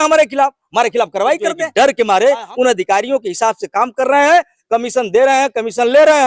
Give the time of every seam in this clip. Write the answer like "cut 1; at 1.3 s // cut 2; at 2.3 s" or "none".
cut 1; at 1.6 s